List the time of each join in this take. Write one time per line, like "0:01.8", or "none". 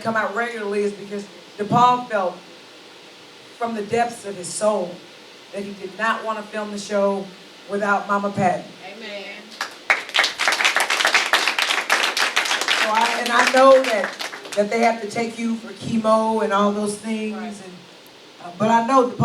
0:13.0

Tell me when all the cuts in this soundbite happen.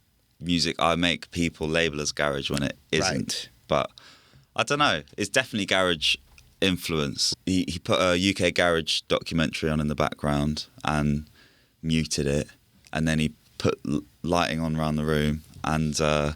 0:07.2

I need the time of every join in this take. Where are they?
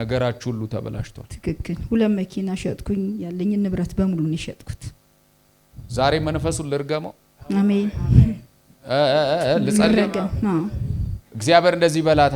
none

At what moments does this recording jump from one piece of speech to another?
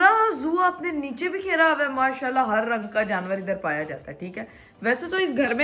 none

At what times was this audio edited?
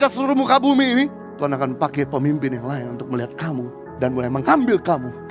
0:01.2
0:03.8

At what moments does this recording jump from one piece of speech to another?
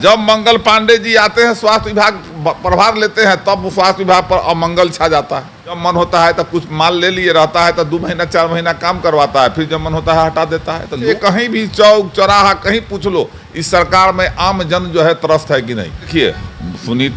0:05.8
0:11.1
0:16.1

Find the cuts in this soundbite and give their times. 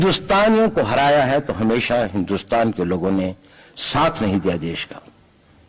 none

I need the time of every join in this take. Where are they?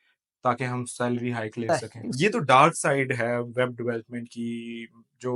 0:01.7

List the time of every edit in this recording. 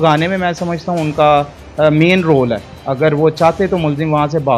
none

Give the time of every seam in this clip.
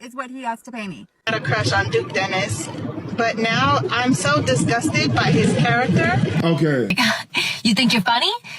0:01.3
0:06.9

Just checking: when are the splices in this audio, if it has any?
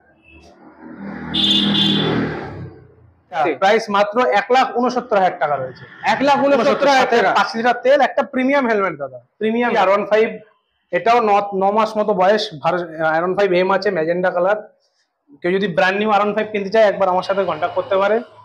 0:03.4
0:09.7

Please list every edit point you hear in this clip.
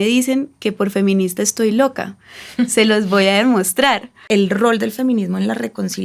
0:04.2

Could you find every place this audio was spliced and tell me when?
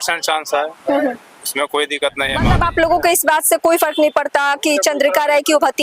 0:02.4

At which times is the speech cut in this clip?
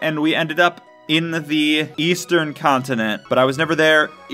0:01.9
0:03.2

